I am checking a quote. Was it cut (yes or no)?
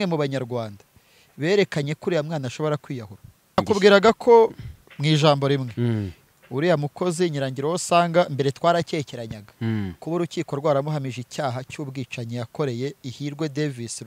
yes